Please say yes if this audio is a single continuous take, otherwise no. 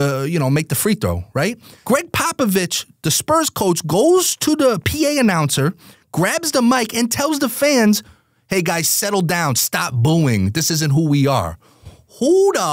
no